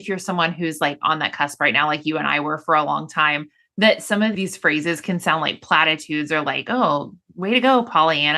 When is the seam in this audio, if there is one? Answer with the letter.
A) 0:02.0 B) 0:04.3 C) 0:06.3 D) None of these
B